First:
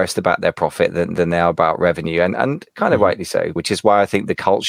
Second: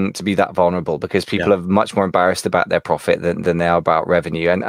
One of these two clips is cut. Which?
first; 1 cut; at 3.5 s

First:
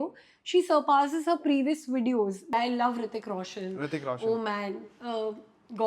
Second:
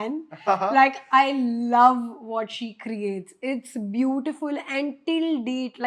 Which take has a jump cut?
first; 1 cut; at 2.5 s

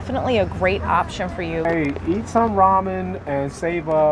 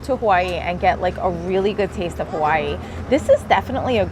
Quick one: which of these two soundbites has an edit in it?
first; 1 cut; at 1.6 s

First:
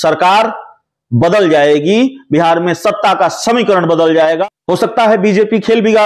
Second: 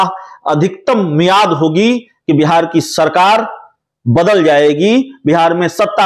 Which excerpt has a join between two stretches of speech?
first; 1 cut; at 4.4 s

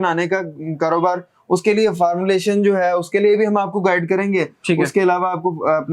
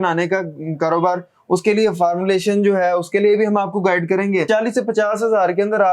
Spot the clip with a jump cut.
second; 1 cut; at 4.5 s

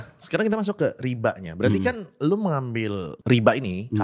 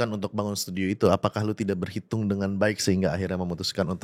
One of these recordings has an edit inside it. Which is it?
first; 1 cut; at 3.1 s

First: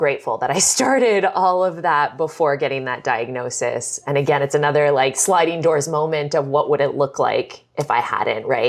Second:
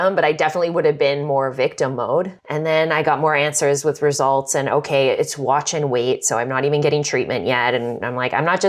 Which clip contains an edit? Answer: second; 1 cut; at 2.4 s

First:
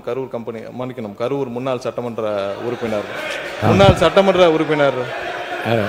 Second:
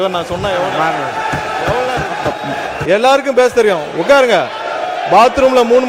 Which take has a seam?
second; 1 cut; at 2.8 s

